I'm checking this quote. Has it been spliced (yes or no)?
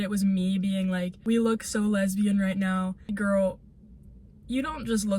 yes